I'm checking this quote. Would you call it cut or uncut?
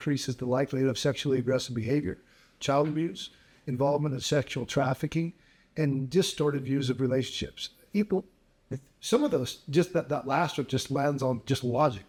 uncut